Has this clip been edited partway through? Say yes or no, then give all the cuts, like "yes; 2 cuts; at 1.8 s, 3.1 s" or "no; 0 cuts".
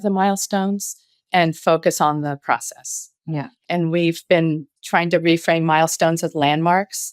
yes; 2 cuts; at 3.5 s, 4.7 s